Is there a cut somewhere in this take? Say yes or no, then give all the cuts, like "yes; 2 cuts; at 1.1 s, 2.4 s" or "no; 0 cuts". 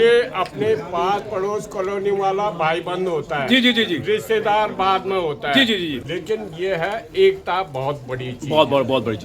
yes; 1 cut; at 6.1 s